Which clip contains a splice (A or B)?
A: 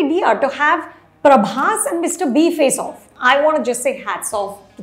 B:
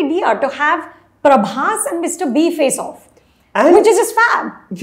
A